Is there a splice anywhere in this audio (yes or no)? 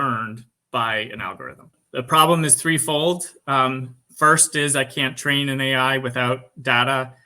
yes